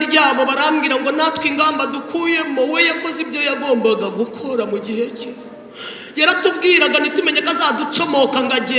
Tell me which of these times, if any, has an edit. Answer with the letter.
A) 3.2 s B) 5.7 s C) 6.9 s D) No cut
D